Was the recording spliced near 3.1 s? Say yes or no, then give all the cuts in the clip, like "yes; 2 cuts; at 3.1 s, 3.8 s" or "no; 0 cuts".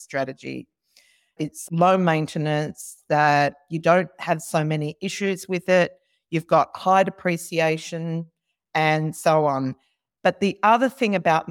no; 1 cut; at 1.3 s